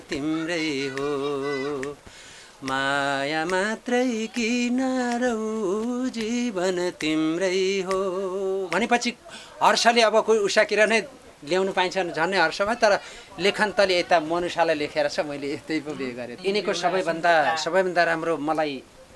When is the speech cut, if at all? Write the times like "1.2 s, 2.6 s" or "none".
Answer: 16.3 s